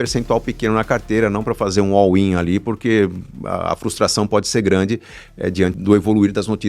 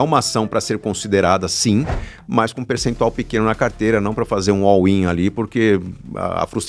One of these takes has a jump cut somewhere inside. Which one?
first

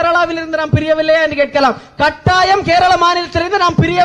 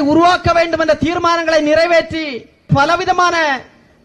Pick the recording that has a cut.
second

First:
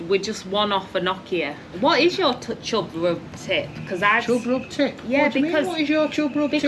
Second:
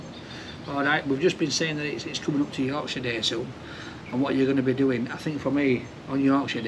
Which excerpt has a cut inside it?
first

